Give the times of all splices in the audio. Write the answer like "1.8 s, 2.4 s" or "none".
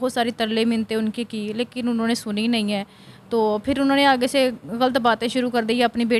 none